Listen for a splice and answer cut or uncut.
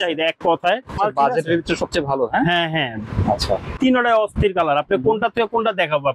cut